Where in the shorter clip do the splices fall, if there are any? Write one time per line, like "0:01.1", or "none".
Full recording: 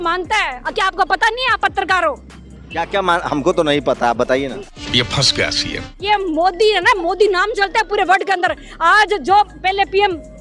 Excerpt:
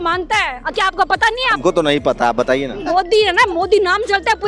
0:01.6
0:02.8

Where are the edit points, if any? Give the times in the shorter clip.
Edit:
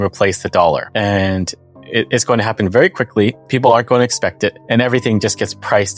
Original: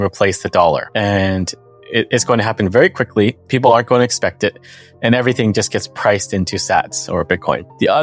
0:04.6

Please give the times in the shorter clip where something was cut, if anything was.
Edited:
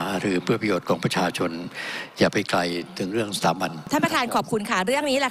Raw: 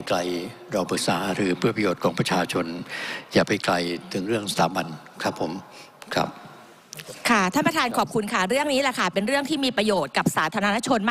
0:03.9

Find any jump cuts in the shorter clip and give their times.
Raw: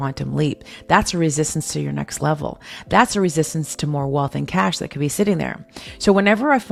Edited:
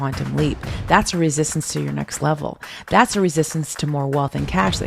none

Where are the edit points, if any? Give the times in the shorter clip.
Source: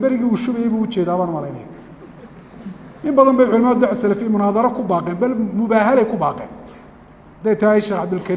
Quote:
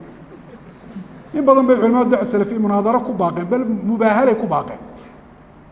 none

